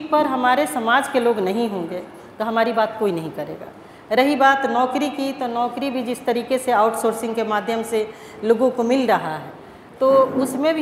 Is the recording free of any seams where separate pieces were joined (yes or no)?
yes